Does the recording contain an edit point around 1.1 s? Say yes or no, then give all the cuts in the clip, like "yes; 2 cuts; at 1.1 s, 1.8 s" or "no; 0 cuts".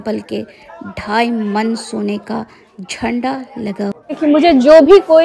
no; 1 cut; at 4.2 s